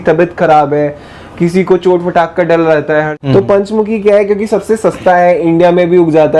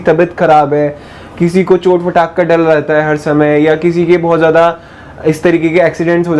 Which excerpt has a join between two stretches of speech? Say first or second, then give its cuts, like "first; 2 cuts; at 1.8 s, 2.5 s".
first; 1 cut; at 3.1 s